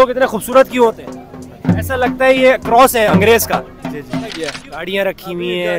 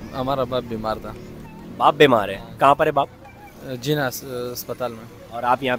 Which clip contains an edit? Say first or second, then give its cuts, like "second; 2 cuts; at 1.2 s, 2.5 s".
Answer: first; 1 cut; at 4.5 s